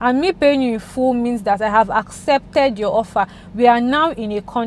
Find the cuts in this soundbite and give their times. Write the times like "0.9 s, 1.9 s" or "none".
none